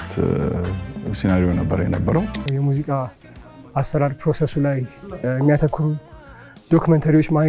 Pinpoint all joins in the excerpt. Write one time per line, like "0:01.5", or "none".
0:02.4